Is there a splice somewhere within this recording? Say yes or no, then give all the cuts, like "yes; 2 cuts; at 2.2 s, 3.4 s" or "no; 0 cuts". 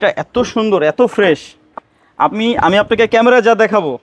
no; 0 cuts